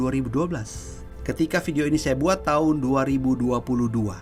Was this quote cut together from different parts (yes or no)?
no